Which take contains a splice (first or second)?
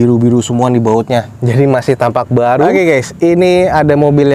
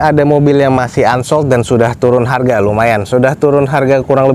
first